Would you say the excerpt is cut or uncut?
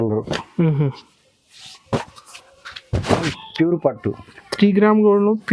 cut